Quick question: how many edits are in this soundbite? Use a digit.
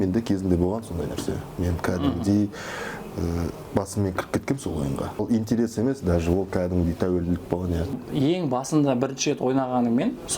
2